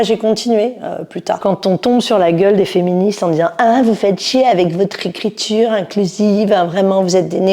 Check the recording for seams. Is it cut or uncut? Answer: cut